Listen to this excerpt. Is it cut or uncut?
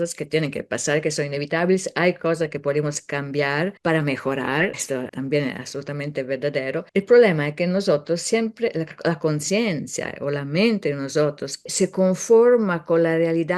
cut